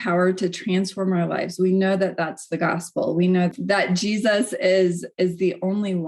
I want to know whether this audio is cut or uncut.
cut